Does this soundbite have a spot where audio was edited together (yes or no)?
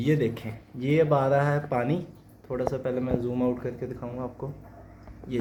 no